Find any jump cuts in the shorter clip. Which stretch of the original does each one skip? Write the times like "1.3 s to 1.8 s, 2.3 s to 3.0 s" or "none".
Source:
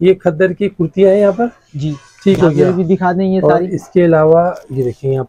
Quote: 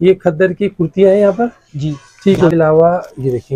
2.5 s to 4.1 s

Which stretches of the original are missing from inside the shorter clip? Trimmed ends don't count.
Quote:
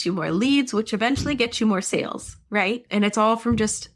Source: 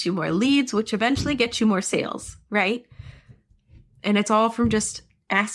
2.8 s to 4.0 s

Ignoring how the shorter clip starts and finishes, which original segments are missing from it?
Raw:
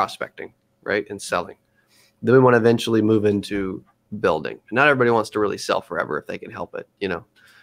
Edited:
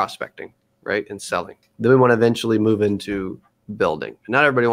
1.6 s to 2.1 s

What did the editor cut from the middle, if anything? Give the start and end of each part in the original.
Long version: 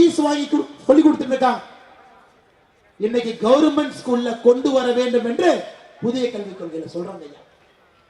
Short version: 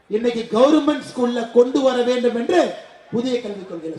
none

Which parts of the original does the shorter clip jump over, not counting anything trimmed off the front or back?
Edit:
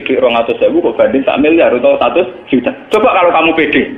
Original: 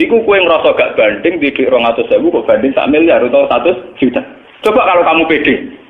4.3 s to 4.5 s

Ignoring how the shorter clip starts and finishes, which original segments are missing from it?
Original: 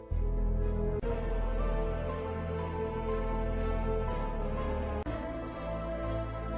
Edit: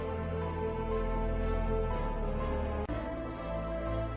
none

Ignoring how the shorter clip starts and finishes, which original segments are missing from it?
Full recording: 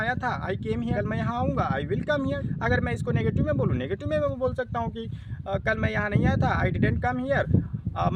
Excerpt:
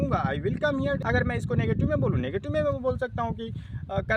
2.4 s to 2.5 s

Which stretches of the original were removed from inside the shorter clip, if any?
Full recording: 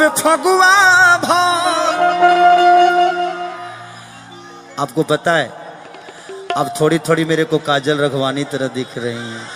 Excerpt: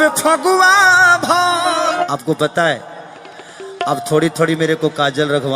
2.0 s to 4.7 s

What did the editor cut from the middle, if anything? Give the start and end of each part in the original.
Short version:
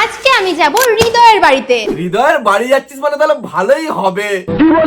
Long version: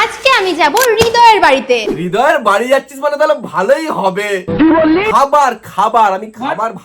none

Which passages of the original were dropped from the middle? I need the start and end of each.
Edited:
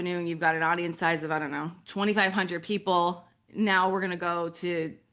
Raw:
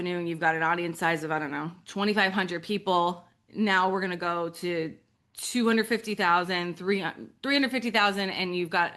none

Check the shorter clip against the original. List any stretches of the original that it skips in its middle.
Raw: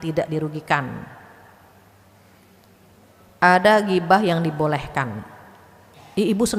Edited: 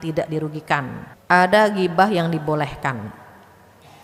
1.1 s to 3.2 s

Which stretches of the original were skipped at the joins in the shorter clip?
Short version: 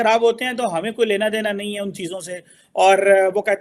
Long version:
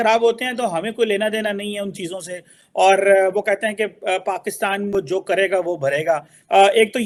none

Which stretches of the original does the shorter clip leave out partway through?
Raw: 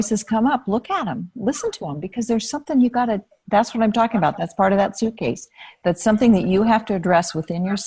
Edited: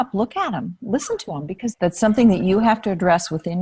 2.2 s to 5.7 s

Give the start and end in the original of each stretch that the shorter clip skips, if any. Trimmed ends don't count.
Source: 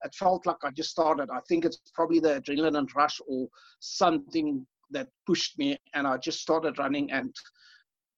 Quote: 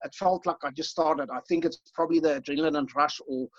none

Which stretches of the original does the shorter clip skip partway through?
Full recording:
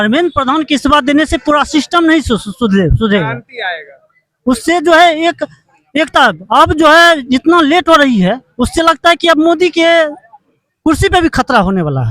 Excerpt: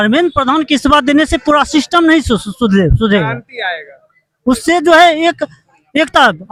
none

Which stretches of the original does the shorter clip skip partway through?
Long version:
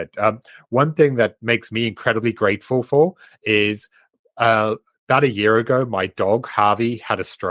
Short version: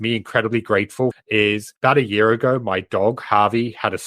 2.9 s to 4.5 s

